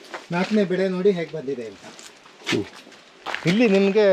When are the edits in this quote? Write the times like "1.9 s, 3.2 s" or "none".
3.2 s